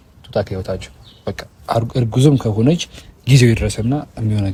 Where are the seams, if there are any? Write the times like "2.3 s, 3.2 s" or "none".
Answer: none